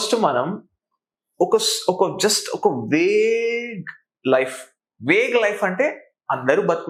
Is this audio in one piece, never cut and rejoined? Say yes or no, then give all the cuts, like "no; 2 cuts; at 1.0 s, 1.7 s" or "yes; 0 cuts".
yes; 0 cuts